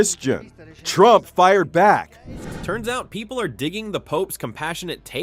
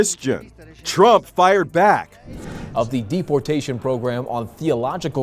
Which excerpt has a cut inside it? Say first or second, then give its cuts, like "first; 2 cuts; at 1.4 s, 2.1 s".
second; 1 cut; at 2.5 s